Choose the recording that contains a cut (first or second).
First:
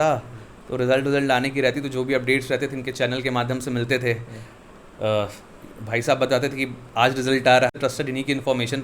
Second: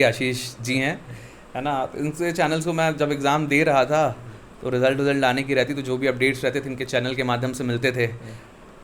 first